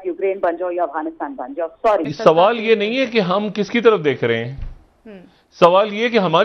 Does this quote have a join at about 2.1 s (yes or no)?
yes